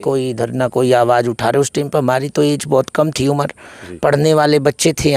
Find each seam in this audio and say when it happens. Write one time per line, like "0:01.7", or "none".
none